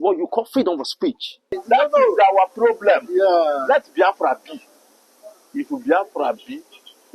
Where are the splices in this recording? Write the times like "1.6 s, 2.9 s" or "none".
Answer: 1.6 s